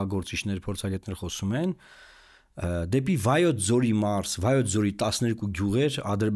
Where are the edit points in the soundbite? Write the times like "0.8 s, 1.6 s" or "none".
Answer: none

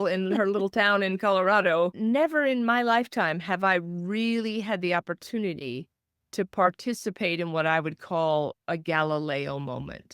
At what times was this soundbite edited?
1.9 s

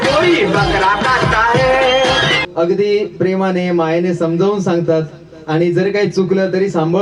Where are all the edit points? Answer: 2.4 s

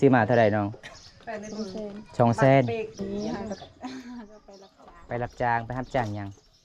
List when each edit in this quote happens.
2.9 s

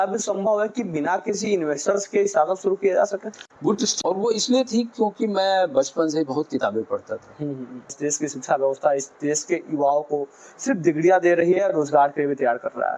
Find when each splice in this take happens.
3.9 s, 8.0 s

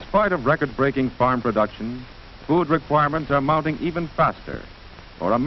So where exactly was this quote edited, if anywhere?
4.1 s

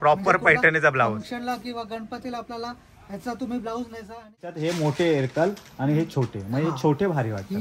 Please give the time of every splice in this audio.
4.6 s

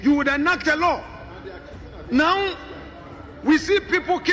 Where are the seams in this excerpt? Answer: none

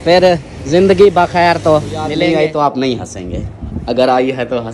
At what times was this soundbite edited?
2.1 s

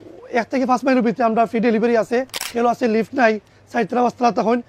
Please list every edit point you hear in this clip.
2.4 s

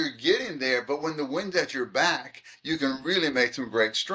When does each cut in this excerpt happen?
none

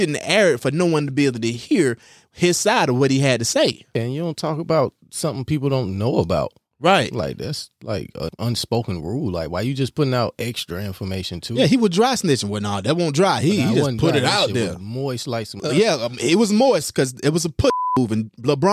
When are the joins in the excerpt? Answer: 3.9 s, 8.3 s, 15.6 s

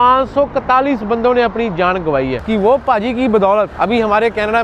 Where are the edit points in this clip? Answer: 2.4 s

